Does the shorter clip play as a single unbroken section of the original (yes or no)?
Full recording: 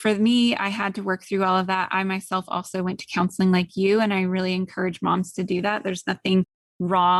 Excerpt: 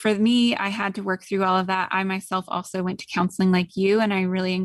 yes